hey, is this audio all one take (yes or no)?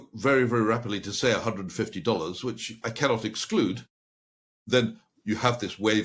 yes